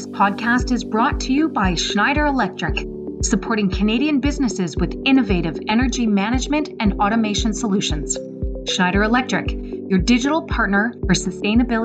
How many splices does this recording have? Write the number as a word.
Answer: zero